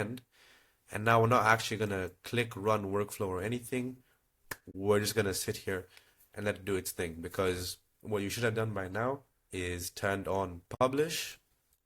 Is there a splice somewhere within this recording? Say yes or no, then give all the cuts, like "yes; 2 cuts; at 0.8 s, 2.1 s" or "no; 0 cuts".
no; 0 cuts